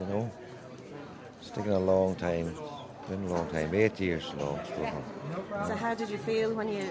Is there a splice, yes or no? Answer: no